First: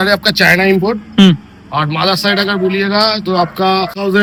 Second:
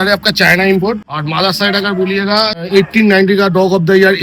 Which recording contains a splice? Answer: second; 2 cuts; at 1.0 s, 2.6 s

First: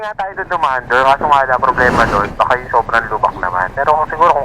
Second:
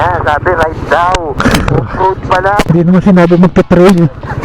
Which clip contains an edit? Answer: second; 2 cuts; at 1.4 s, 2.7 s

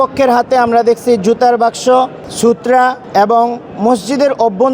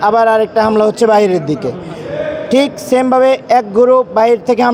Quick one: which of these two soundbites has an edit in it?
first; 1 cut; at 2.7 s

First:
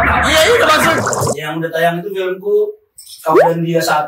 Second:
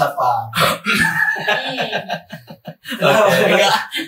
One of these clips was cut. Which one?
first; 1 cut; at 1.0 s

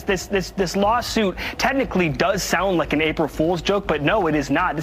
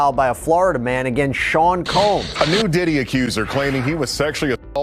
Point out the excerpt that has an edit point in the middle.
second; 1 cut; at 2.3 s

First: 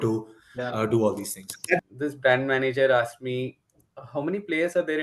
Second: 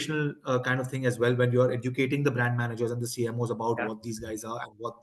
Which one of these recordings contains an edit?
first; 1 cut; at 1.8 s

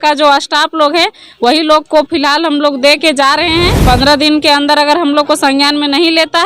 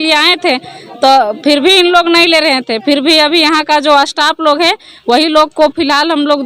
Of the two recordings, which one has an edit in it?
first; 1 cut; at 3.8 s

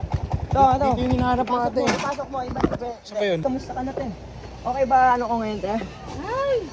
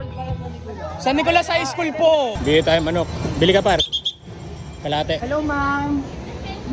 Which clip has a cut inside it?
second; 1 cut; at 2.4 s

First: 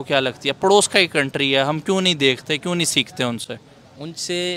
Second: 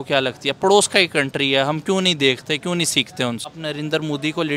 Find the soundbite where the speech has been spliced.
second; 1 cut; at 3.5 s

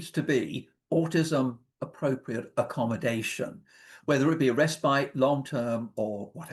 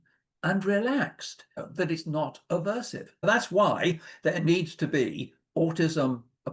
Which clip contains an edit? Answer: second; 2 cuts; at 1.5 s, 3.2 s

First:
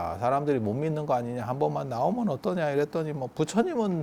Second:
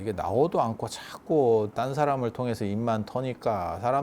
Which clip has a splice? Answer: second; 1 cut; at 1.7 s

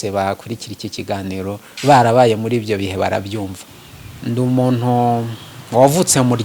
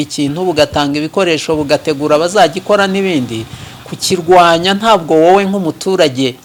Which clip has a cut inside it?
first; 1 cut; at 3.6 s

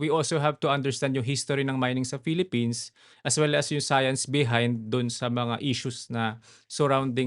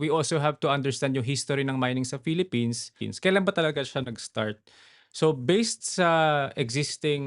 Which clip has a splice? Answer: second; 1 cut; at 3.0 s

